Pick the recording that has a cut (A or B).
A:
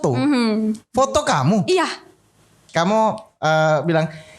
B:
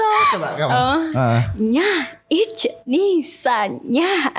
A